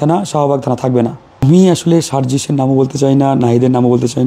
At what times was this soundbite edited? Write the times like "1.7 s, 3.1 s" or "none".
1.3 s